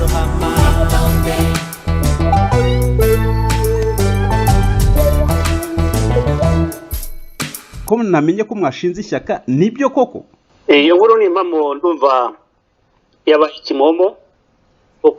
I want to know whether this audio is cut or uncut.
cut